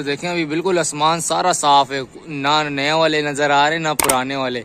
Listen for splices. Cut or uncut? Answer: uncut